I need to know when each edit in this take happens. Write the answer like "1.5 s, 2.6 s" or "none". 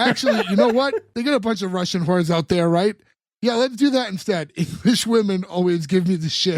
1.1 s